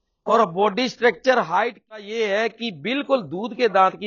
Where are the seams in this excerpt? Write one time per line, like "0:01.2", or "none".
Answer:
0:02.1